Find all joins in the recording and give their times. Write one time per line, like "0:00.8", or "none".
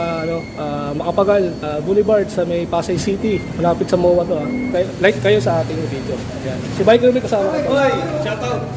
0:01.7
0:05.2